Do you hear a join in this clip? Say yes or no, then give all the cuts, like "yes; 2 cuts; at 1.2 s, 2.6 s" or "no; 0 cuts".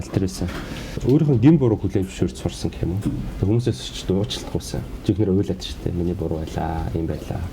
yes; 2 cuts; at 1.0 s, 4.9 s